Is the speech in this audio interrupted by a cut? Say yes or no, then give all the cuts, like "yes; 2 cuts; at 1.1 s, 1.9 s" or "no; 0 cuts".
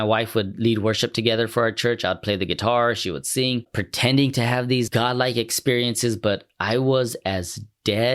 yes; 2 cuts; at 3.8 s, 4.9 s